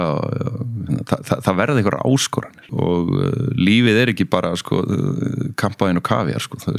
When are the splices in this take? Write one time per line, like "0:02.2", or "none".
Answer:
0:02.7